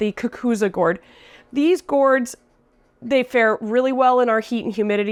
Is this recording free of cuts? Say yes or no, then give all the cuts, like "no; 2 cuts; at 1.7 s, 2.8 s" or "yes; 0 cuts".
yes; 0 cuts